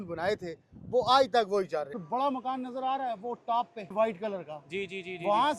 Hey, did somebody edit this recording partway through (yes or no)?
yes